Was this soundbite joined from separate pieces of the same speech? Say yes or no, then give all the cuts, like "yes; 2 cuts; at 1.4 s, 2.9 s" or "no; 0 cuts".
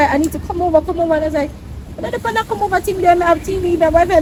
no; 0 cuts